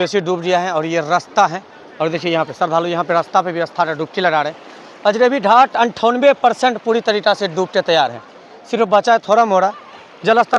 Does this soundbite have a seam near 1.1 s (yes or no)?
no